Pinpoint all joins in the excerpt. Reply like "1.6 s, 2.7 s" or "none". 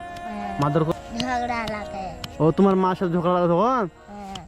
0.9 s